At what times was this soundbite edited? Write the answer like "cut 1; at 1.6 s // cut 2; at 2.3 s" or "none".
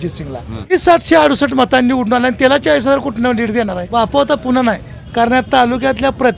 cut 1; at 0.7 s // cut 2; at 3.9 s // cut 3; at 5.0 s